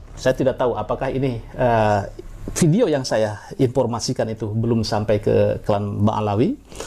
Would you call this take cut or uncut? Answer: uncut